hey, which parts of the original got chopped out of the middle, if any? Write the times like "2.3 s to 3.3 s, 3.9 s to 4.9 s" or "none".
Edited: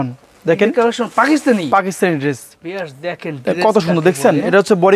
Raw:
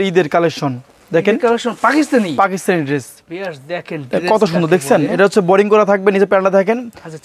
none